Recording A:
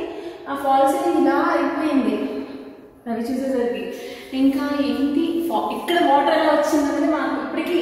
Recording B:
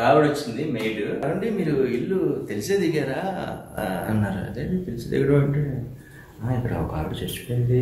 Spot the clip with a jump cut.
B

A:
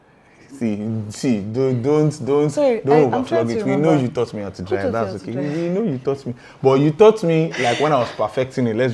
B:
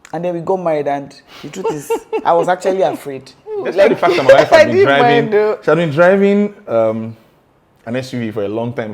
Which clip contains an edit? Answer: B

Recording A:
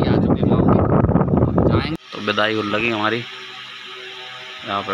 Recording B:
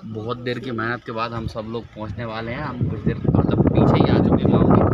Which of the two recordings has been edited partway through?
A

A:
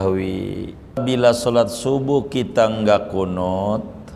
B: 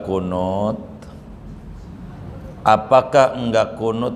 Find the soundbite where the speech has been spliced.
A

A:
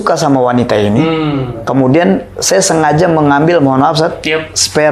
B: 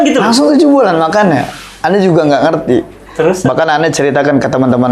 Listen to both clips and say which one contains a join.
A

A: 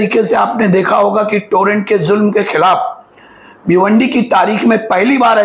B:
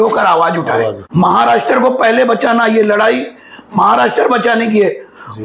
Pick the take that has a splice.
B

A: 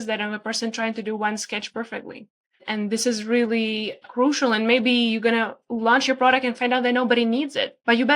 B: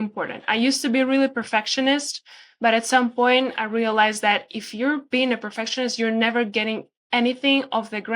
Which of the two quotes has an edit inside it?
A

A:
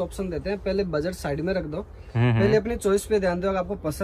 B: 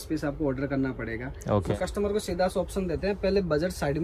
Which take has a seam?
B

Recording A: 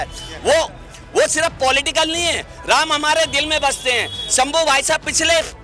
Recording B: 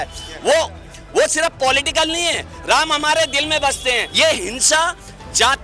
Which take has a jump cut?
B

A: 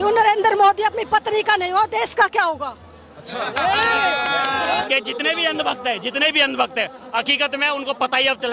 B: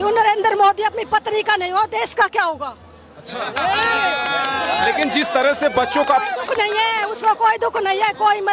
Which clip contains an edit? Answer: A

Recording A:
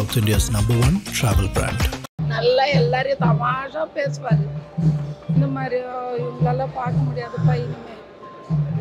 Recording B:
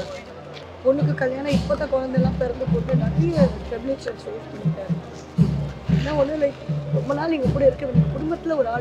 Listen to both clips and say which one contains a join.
A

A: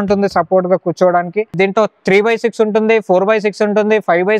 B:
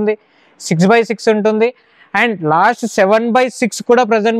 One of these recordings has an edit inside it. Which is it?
A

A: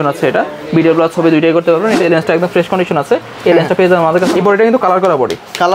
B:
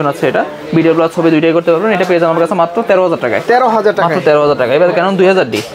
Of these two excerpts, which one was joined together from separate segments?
A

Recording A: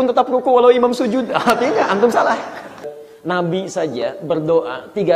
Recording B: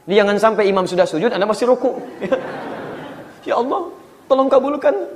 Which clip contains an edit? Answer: A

